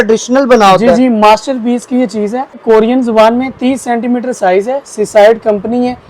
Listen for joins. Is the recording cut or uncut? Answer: cut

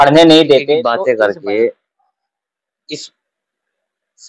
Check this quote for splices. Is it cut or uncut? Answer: cut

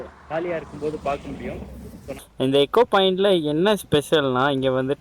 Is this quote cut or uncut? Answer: cut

